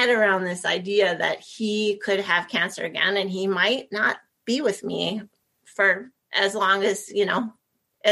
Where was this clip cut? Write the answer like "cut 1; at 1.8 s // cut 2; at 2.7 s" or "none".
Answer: none